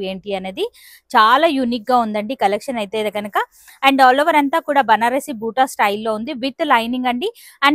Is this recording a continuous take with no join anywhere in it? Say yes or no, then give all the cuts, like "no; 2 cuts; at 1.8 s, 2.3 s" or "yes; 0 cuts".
yes; 0 cuts